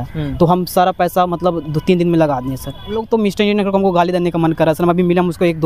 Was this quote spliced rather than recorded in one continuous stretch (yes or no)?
yes